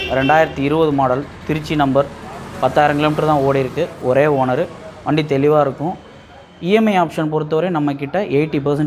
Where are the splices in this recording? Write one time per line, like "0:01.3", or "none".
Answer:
none